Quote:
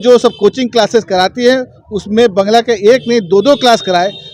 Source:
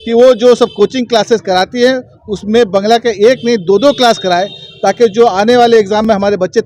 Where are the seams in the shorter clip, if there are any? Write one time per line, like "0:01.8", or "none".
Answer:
none